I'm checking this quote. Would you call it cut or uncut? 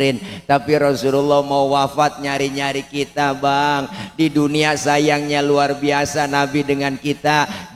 uncut